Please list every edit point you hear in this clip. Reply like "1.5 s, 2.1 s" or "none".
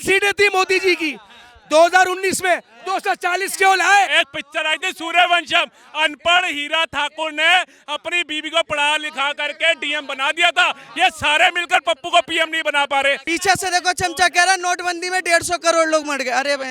4.1 s, 13.2 s